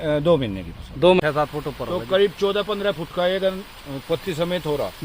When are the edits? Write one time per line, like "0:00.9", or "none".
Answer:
0:01.2